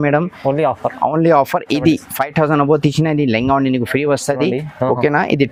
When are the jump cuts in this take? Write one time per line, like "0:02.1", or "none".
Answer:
none